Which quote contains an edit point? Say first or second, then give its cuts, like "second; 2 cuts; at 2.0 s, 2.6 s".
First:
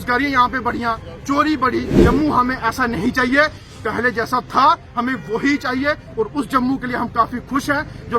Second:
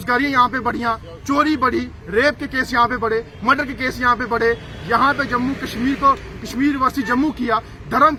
first; 1 cut; at 2.0 s